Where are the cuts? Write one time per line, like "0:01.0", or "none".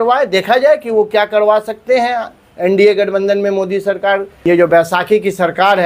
0:04.3